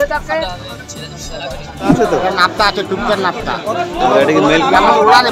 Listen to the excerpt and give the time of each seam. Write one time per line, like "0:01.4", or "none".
0:02.0

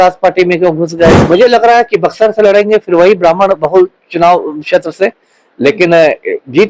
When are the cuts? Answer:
0:01.2

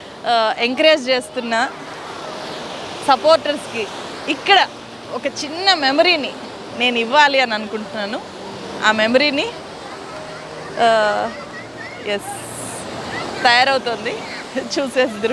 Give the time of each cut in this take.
none

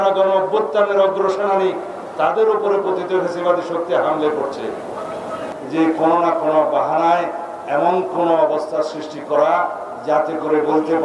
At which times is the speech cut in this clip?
0:05.5

